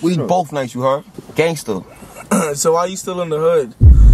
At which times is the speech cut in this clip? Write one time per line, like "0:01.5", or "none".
none